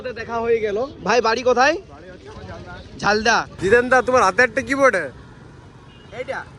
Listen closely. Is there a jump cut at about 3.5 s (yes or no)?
yes